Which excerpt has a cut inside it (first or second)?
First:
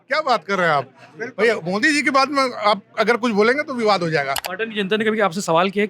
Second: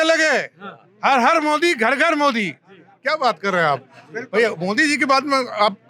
first